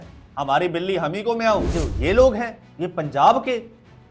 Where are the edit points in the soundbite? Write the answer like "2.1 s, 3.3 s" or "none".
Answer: 1.7 s, 2.6 s